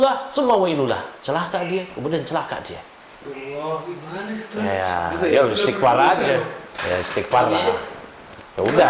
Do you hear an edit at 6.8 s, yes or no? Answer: no